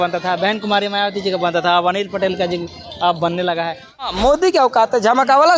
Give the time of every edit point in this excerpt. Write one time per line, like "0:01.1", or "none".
0:04.1